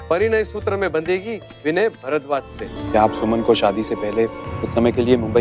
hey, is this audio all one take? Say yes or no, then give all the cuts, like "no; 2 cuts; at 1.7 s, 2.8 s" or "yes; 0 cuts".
no; 1 cut; at 2.7 s